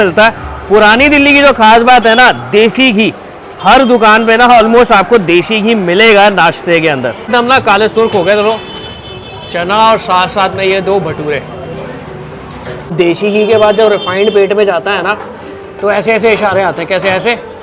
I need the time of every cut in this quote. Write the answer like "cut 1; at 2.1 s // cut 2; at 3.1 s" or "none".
cut 1; at 7.3 s // cut 2; at 12.9 s